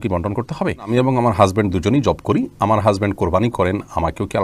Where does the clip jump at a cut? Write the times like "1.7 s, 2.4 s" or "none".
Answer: 0.9 s